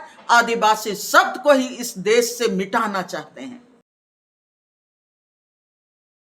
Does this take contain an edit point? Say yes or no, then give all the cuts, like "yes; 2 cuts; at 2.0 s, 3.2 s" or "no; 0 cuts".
no; 0 cuts